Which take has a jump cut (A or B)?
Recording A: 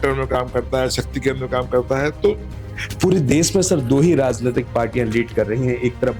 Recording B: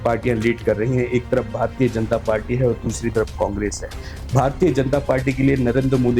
A